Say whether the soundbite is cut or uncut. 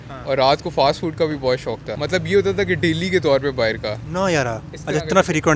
cut